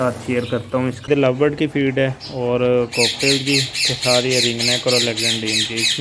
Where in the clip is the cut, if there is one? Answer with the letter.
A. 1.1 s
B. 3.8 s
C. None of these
A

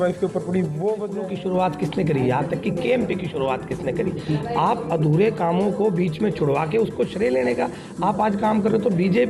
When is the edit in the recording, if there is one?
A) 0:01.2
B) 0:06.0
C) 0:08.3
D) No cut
A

